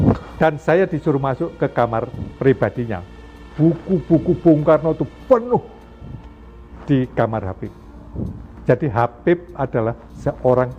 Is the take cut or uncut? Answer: uncut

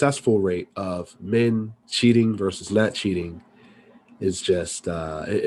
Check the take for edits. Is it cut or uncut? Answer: uncut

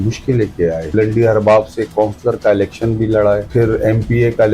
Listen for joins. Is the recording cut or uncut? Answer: cut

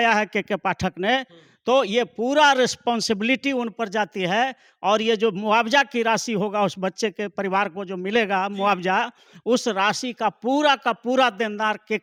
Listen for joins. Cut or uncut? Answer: uncut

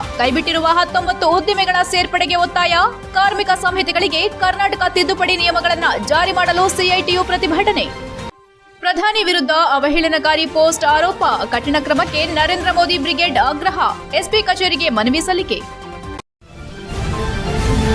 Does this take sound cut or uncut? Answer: cut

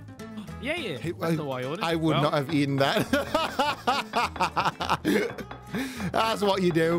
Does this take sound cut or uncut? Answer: uncut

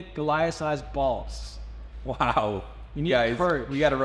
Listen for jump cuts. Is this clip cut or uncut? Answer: uncut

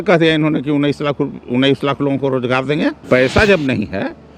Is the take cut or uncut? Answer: cut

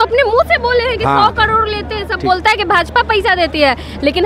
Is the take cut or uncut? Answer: uncut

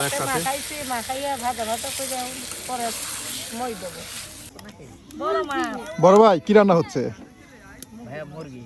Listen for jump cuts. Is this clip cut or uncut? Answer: cut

